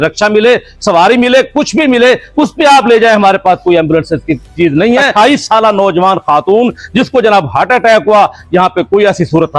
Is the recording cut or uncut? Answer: cut